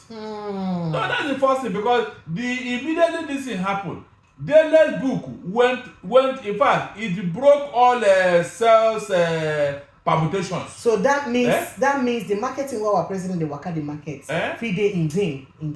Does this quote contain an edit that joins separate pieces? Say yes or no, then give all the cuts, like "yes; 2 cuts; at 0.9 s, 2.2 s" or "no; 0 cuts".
no; 0 cuts